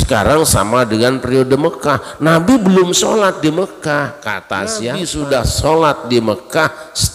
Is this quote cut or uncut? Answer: cut